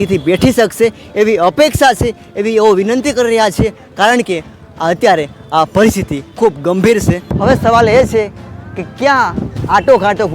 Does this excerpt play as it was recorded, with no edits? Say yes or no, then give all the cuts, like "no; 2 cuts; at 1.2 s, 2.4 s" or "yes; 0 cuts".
no; 1 cut; at 7.3 s